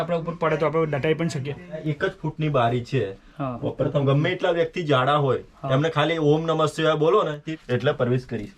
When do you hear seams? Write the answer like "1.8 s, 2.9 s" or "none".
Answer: 1.8 s, 7.5 s

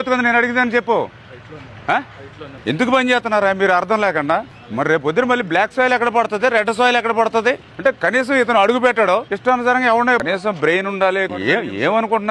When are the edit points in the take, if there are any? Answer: 10.2 s, 11.3 s

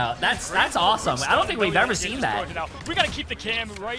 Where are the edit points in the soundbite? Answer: 2.8 s

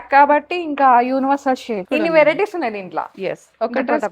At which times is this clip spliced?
1.8 s

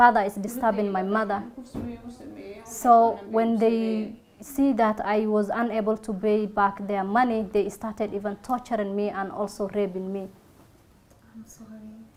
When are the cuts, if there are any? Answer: none

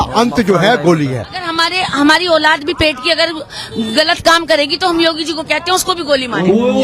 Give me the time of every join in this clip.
1.4 s

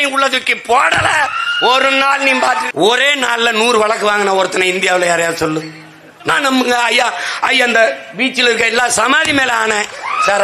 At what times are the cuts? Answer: 2.7 s, 6.3 s

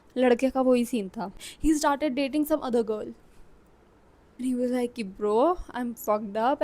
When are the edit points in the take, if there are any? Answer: 1.4 s, 4.4 s

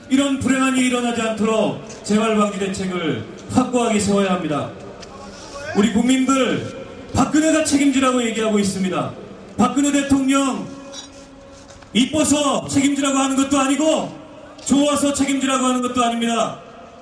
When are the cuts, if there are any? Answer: none

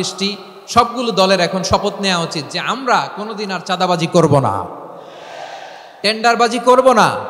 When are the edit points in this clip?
none

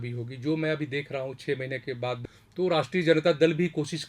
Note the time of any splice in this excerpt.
2.4 s

